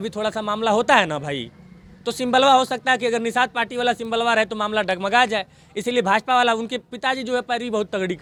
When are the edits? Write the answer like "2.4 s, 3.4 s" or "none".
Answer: none